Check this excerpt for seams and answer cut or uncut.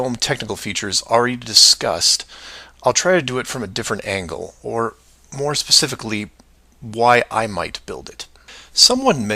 cut